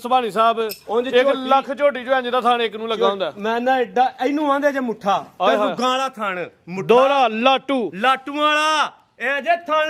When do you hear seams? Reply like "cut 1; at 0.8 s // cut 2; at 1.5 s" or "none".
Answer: none